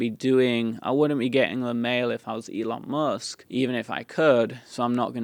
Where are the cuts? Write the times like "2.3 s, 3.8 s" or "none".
3.3 s